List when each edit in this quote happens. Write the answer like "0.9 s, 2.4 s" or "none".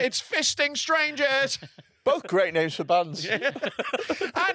none